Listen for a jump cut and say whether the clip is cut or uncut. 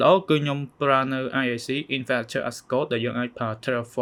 uncut